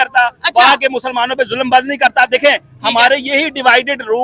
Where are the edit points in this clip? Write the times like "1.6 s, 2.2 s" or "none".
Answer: none